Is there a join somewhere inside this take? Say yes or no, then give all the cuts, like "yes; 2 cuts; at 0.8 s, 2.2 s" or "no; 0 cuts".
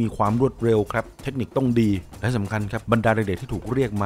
no; 0 cuts